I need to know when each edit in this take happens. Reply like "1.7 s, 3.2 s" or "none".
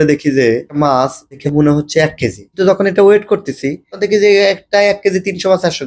0.9 s, 2.4 s